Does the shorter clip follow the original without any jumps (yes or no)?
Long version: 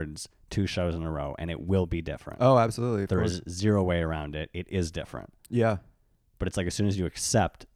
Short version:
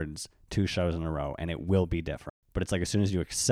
no